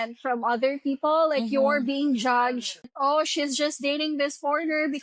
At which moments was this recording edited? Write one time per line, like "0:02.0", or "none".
0:02.9